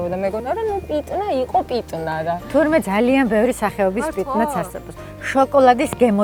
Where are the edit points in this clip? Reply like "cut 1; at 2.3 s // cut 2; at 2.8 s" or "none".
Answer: none